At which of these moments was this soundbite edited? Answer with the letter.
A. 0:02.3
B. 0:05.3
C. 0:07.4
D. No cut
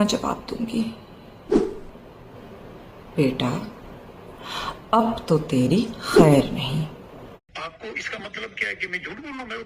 C